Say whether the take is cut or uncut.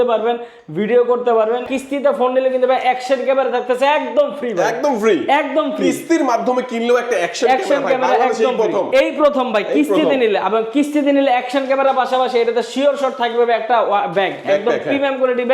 cut